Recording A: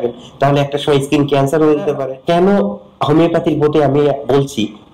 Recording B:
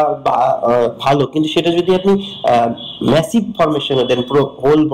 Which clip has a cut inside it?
A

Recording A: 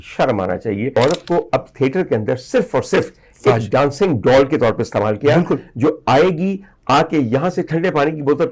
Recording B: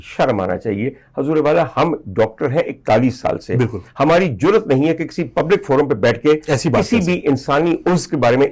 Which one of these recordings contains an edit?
A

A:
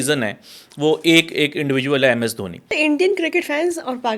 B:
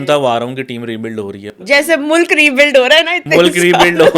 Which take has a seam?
A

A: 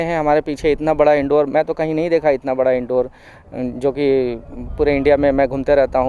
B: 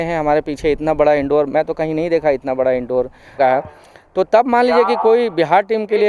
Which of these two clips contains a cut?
B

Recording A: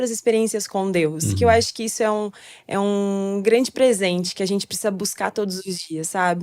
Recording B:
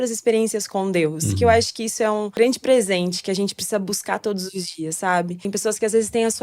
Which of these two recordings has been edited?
B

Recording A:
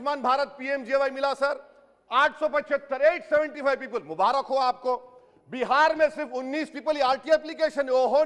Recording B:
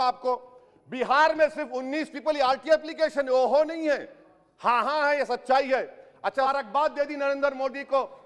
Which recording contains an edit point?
B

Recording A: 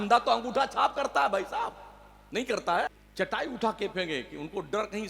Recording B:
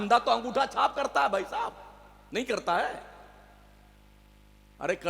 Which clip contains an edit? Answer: A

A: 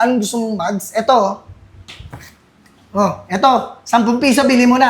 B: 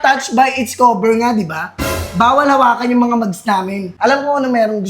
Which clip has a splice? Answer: B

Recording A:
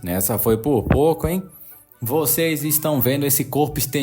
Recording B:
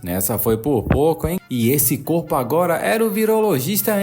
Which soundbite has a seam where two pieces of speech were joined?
B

